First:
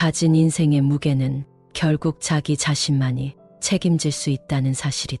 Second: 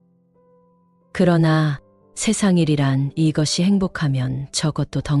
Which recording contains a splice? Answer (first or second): second